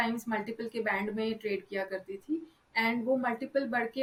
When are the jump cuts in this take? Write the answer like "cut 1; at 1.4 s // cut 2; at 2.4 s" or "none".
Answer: none